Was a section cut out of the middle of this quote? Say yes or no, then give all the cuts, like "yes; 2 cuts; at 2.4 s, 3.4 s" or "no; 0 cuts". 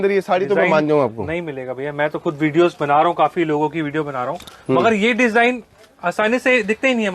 no; 0 cuts